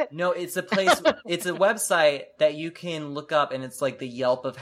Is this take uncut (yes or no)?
yes